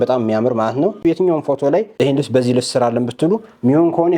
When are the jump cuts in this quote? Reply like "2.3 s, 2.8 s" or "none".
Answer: 1.0 s, 2.0 s

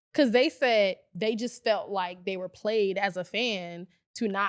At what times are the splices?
none

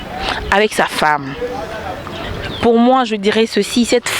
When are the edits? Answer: 2.2 s

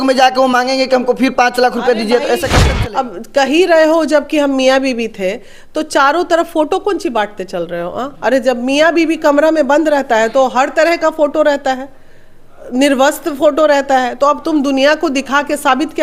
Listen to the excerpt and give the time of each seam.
2.5 s

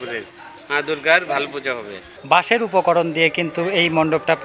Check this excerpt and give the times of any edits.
2.0 s

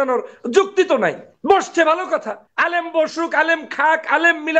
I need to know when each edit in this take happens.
1.3 s, 2.4 s

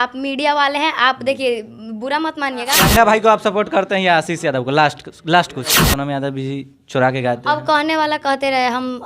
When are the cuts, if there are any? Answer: 2.8 s, 5.8 s

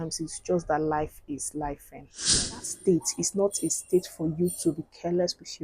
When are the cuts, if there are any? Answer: 2.4 s

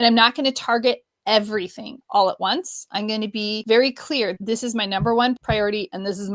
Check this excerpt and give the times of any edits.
3.6 s, 4.4 s, 5.4 s

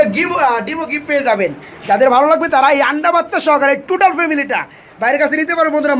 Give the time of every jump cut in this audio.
none

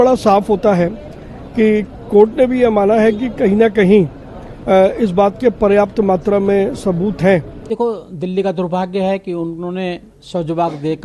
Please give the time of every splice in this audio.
7.6 s

